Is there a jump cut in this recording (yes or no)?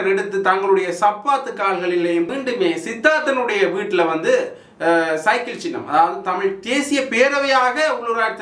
yes